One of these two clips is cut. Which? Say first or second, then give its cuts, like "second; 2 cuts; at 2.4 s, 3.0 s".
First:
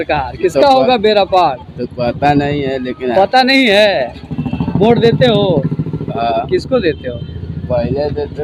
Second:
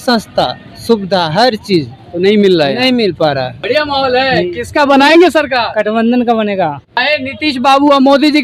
second; 2 cuts; at 3.5 s, 7.0 s